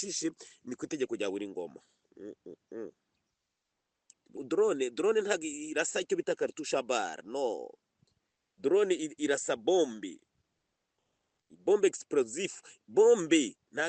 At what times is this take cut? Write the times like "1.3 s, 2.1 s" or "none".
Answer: 4.4 s